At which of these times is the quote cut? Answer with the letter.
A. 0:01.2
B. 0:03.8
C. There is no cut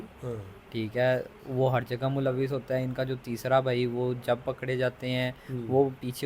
C